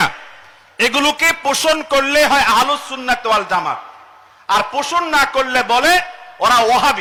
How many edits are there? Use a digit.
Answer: 0